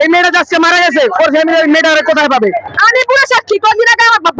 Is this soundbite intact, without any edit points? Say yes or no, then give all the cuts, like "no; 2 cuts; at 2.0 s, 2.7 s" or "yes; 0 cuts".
no; 1 cut; at 2.7 s